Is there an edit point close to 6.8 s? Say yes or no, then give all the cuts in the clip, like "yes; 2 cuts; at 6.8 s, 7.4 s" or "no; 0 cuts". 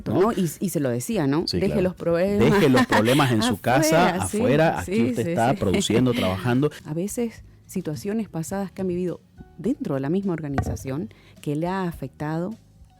yes; 1 cut; at 6.8 s